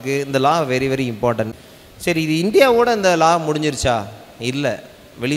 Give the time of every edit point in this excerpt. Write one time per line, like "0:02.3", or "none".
0:01.5